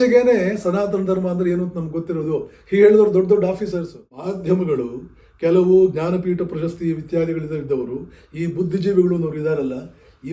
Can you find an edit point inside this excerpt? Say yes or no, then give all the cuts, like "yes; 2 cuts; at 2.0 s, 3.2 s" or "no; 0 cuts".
yes; 1 cut; at 4.2 s